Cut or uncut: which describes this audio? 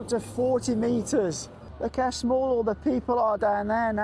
cut